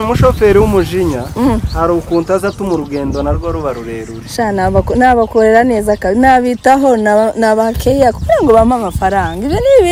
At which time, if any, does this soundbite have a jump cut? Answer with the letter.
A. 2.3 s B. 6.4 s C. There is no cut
C